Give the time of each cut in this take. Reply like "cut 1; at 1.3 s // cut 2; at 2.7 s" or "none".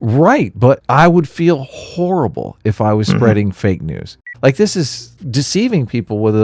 cut 1; at 0.8 s // cut 2; at 4.2 s // cut 3; at 5.2 s